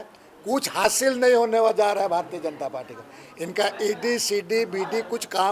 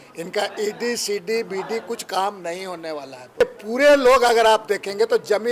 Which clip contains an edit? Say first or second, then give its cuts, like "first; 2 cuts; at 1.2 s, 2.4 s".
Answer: second; 1 cut; at 3.4 s